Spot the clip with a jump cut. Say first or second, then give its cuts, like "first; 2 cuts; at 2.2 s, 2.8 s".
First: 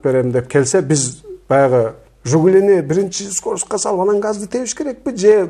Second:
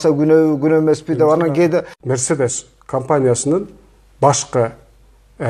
second; 1 cut; at 2.0 s